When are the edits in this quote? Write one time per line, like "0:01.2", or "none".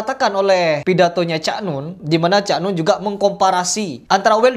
0:02.0